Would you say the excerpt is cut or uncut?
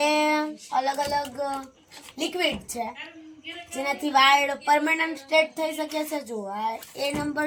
uncut